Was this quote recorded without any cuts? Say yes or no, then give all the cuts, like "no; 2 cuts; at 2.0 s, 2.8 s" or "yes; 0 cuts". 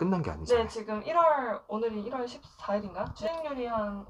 yes; 0 cuts